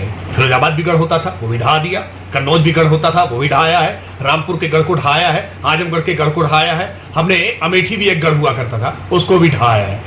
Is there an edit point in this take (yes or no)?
no